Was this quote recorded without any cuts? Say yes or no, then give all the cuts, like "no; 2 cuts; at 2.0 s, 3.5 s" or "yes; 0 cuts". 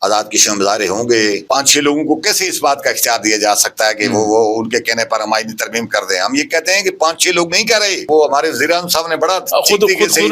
no; 2 cuts; at 1.4 s, 8.0 s